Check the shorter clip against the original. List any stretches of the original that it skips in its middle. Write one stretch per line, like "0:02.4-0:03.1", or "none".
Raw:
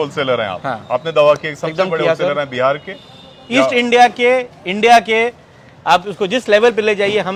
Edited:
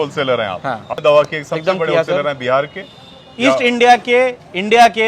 0:00.9-0:01.1